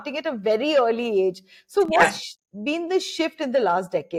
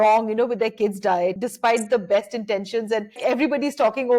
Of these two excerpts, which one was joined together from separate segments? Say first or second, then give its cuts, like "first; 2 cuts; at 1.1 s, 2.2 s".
second; 2 cuts; at 1.4 s, 3.2 s